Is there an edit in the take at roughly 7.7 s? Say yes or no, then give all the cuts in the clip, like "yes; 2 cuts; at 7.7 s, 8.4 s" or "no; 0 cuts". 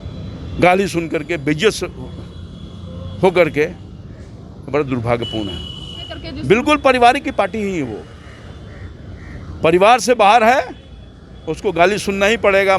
no; 1 cut; at 6.2 s